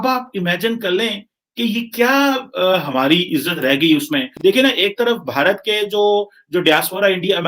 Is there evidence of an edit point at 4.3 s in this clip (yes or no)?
yes